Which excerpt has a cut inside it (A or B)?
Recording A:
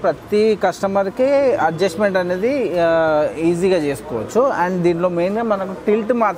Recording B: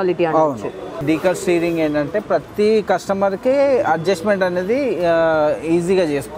B